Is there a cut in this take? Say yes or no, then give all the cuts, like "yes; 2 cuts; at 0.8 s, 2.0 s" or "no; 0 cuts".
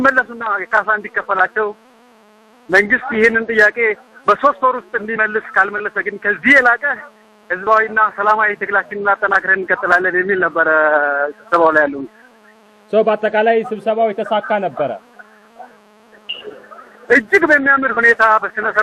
no; 0 cuts